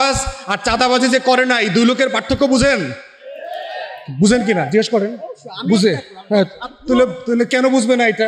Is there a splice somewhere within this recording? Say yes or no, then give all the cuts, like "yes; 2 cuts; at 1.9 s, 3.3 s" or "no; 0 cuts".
no; 0 cuts